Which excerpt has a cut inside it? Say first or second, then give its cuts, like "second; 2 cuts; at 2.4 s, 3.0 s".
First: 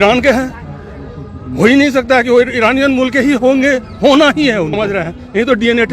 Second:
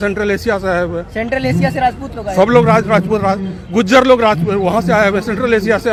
first; 1 cut; at 4.8 s